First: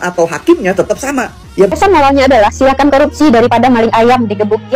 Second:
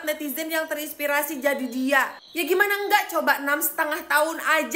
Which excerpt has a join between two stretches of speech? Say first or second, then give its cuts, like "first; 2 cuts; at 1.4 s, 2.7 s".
first; 1 cut; at 1.7 s